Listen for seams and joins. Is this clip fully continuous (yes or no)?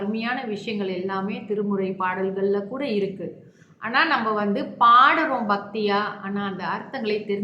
yes